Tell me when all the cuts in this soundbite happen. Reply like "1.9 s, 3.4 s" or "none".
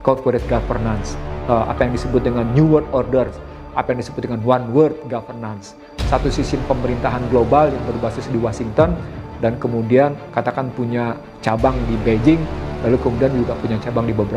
none